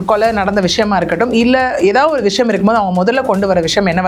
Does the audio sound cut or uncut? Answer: uncut